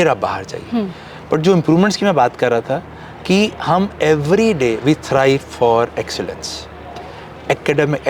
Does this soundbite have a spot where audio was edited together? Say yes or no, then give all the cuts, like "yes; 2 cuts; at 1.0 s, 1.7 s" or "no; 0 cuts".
no; 0 cuts